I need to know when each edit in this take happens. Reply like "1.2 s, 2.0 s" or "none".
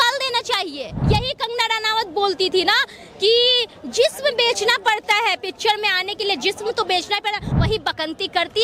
0.9 s, 7.5 s